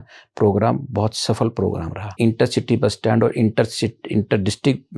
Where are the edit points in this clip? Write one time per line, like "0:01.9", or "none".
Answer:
0:02.2